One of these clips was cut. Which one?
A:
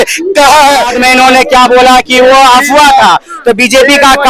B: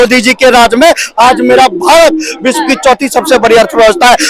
A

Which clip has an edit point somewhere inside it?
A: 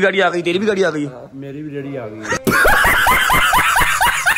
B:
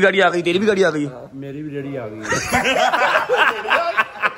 B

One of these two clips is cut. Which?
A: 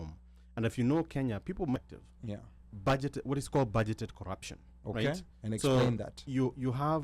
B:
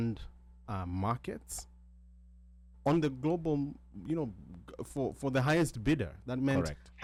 A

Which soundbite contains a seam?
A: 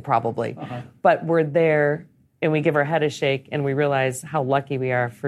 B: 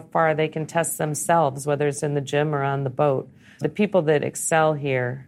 B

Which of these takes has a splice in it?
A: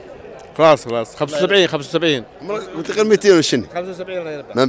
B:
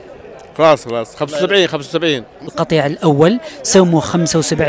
B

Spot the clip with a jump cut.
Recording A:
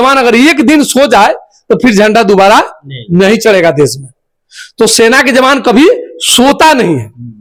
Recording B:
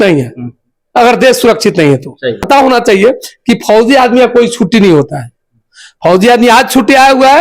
B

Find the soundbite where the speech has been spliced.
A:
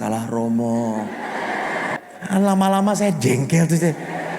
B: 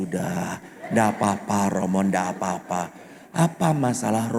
A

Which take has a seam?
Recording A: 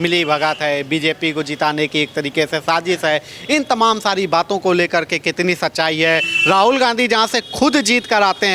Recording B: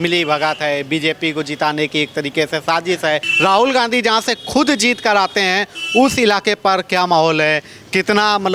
B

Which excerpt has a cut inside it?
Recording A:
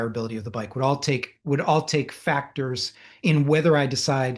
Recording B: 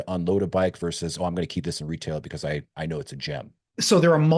B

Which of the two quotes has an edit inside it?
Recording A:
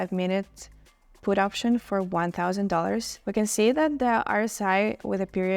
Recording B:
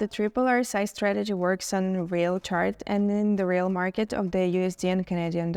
A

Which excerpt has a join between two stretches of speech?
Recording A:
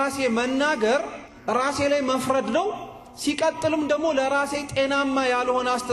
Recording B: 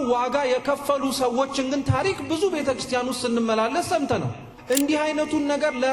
B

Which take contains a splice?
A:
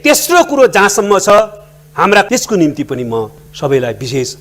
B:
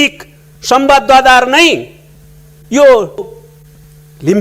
A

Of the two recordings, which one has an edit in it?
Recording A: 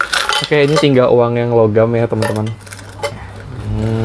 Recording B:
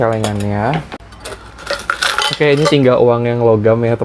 B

